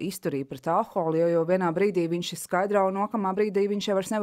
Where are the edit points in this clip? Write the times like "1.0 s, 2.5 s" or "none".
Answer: none